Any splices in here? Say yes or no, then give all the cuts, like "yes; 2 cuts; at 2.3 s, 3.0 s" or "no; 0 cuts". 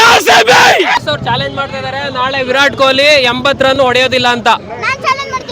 yes; 1 cut; at 1.0 s